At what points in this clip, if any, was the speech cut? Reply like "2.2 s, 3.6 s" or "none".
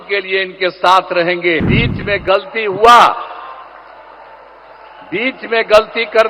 1.7 s